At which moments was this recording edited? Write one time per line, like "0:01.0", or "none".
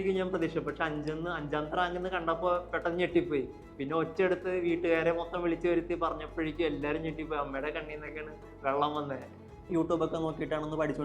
0:09.6